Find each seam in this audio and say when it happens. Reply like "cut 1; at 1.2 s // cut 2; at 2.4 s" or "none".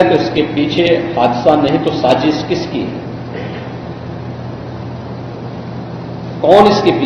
none